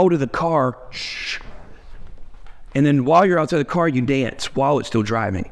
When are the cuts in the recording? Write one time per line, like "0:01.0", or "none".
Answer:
none